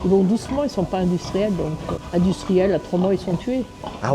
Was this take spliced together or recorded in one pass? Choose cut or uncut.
cut